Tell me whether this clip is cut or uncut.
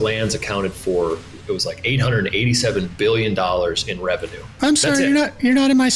cut